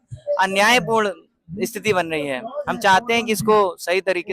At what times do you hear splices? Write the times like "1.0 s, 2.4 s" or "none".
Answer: none